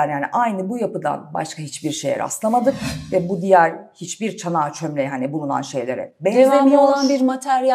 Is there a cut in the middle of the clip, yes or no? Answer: no